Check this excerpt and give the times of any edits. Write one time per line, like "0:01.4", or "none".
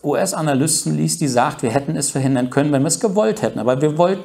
none